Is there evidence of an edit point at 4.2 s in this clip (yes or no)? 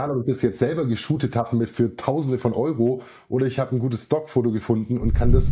no